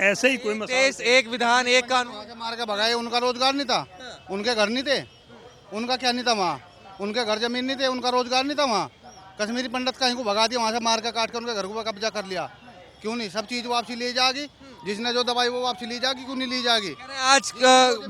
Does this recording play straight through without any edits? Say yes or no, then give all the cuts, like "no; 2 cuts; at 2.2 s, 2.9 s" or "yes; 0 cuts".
yes; 0 cuts